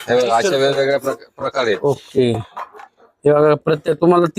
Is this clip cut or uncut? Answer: cut